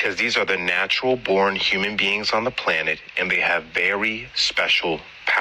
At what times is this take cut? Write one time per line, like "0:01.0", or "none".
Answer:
none